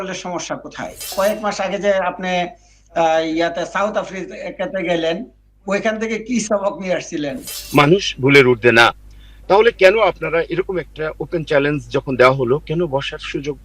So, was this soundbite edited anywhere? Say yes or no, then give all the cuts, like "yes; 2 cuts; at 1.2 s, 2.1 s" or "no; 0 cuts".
yes; 2 cuts; at 1.1 s, 7.5 s